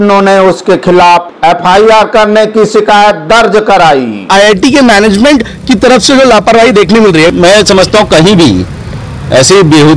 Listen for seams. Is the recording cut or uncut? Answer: cut